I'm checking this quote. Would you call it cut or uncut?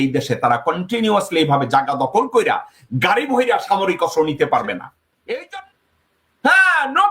cut